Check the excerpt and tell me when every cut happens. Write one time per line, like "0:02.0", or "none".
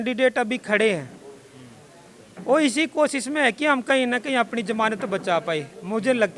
none